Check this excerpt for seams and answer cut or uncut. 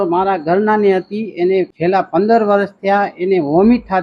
uncut